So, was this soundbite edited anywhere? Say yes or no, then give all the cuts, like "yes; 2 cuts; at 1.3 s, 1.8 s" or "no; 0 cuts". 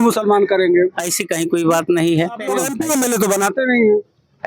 yes; 1 cut; at 2.6 s